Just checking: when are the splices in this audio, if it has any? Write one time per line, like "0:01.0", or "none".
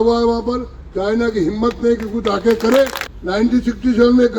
0:03.1

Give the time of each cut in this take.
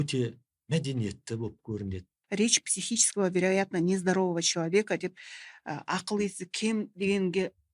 0:02.1

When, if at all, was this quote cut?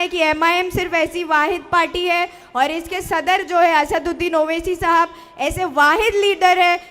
none

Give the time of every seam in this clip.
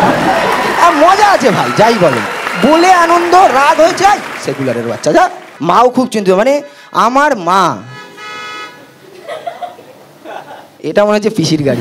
0:05.5

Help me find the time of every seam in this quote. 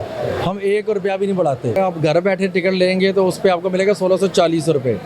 0:01.8

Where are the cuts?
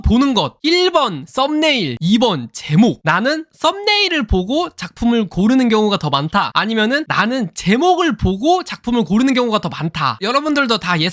none

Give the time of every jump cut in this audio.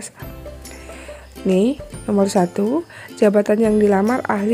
none

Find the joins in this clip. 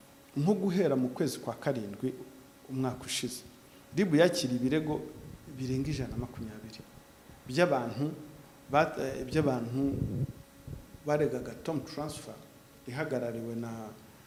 none

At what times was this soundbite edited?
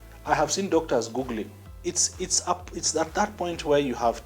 0:01.6

